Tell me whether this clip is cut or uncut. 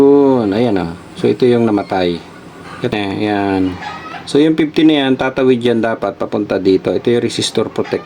cut